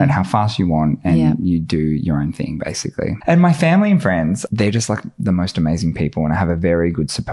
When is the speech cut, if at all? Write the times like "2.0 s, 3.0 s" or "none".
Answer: 3.2 s, 4.4 s